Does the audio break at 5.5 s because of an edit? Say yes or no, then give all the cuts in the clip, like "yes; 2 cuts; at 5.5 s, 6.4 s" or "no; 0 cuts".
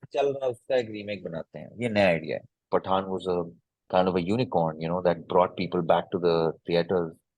no; 1 cut; at 2.7 s